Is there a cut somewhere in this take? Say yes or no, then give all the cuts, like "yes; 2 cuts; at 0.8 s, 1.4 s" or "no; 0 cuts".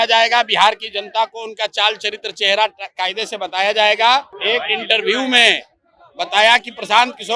yes; 1 cut; at 4.3 s